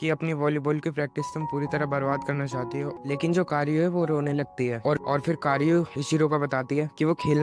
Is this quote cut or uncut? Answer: cut